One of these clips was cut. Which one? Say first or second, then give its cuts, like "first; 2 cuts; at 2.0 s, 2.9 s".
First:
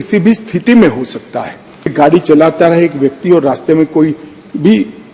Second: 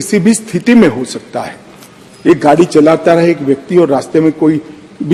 first; 1 cut; at 1.9 s